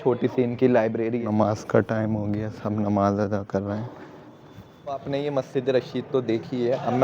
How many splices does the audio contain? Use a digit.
2